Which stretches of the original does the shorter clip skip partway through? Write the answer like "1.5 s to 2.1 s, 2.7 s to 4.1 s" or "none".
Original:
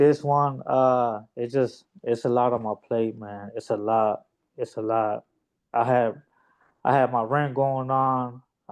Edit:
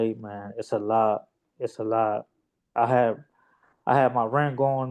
none